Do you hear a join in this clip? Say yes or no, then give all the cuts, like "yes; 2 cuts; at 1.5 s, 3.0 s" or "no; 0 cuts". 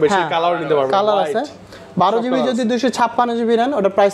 no; 0 cuts